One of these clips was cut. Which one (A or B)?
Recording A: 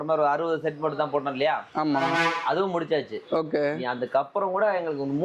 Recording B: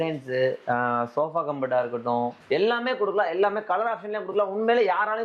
B